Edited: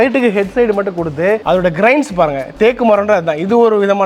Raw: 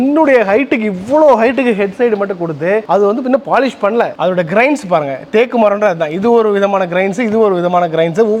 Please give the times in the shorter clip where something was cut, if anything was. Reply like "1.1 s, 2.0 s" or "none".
1.4 s